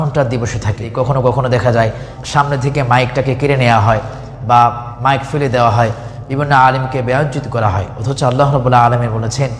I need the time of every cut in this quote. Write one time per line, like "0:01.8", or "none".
0:00.9
0:02.1